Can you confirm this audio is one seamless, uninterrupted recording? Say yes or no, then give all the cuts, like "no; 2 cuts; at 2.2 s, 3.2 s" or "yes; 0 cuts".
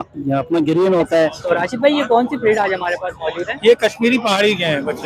no; 1 cut; at 1.5 s